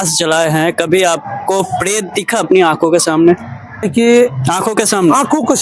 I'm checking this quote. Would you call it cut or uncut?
cut